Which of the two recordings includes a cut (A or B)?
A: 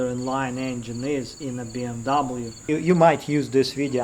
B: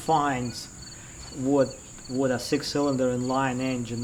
A